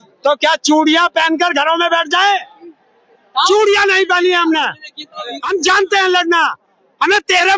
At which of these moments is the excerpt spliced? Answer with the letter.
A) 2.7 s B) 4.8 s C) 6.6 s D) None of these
D